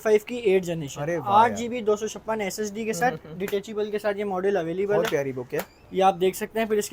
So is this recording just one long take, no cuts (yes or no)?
yes